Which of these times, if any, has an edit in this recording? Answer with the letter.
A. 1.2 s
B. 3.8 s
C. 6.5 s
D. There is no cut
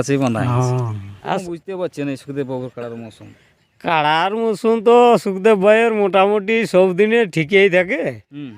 A